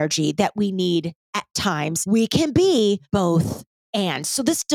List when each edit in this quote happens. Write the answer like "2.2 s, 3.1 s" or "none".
1.9 s, 3.0 s